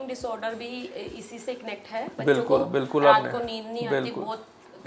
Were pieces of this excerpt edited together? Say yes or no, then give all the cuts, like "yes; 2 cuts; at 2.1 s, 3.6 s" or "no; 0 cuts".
no; 0 cuts